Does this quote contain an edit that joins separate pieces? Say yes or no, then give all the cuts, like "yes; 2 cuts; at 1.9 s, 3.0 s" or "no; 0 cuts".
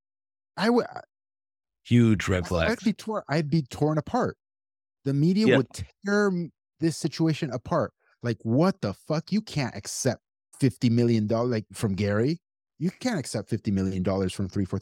no; 0 cuts